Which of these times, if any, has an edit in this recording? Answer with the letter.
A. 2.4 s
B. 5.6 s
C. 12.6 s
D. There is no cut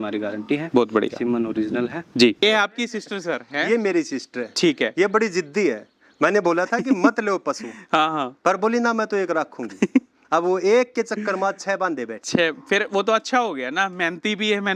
A